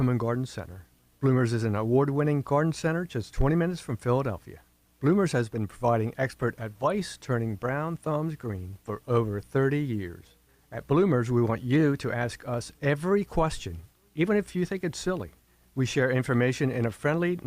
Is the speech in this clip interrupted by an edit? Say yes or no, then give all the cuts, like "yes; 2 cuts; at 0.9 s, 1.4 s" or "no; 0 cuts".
no; 0 cuts